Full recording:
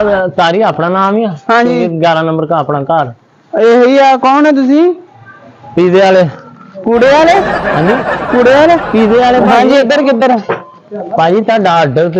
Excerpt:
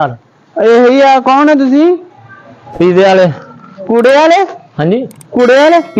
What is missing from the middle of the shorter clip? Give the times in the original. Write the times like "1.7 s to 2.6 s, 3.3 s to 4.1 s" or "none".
none